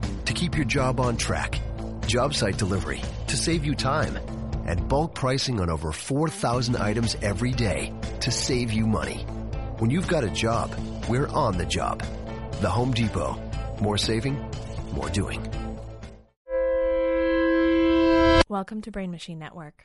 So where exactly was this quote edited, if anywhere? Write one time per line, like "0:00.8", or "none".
0:16.5
0:18.4